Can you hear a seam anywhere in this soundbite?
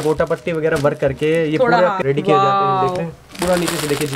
yes; 2 cuts; at 2.0 s, 3.3 s

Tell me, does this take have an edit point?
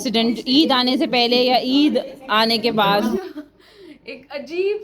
yes; 1 cut; at 3.1 s

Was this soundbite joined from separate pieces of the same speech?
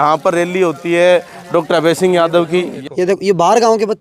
yes; 1 cut; at 2.7 s

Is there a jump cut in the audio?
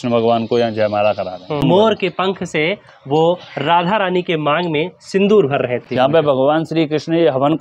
yes; 2 cuts; at 1.6 s, 5.9 s

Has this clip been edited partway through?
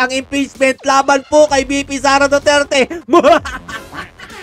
no; 0 cuts

